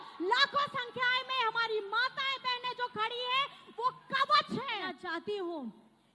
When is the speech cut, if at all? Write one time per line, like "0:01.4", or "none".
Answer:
0:04.9